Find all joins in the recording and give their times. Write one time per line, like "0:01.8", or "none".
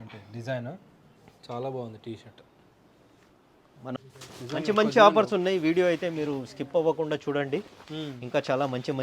0:04.0